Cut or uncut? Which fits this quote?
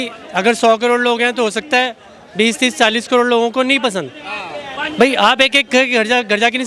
uncut